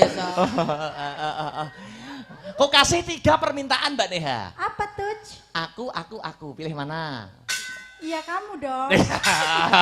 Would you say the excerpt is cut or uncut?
cut